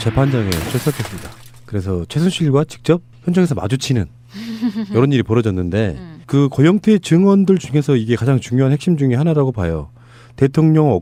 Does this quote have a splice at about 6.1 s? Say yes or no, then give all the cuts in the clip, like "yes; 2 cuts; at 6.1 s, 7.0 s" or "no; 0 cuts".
no; 0 cuts